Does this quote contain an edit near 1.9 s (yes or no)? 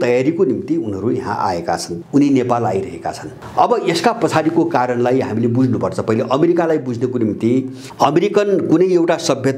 yes